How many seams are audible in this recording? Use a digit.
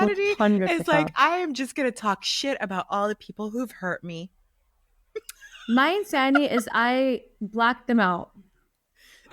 0